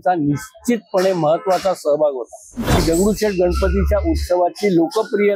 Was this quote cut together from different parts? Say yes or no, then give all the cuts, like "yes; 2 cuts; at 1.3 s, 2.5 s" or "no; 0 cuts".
yes; 1 cut; at 2.8 s